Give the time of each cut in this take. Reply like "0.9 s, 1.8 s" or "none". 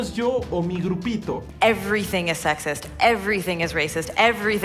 1.5 s